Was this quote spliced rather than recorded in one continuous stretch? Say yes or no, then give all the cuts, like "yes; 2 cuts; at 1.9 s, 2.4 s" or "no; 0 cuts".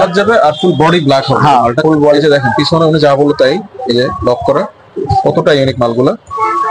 no; 0 cuts